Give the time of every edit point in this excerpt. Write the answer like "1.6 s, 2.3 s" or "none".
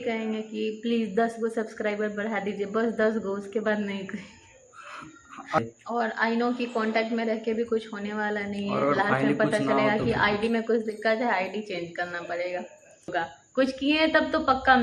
5.6 s, 13.1 s